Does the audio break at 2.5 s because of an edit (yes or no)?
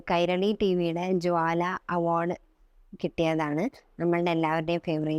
no